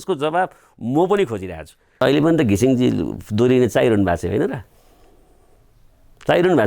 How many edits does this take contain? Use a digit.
1